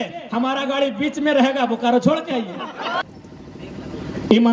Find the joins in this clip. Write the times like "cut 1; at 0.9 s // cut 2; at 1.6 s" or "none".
cut 1; at 3.0 s